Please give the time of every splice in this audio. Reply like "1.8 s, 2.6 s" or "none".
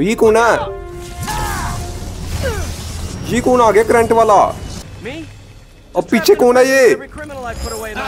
4.7 s